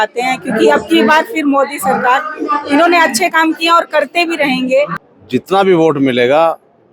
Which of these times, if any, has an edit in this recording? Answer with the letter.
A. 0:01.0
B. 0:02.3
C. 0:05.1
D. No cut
C